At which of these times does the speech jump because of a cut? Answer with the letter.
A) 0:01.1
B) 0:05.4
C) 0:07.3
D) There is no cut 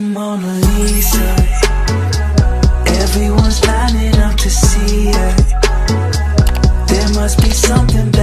D